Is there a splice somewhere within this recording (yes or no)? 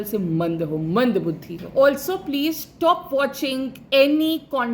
yes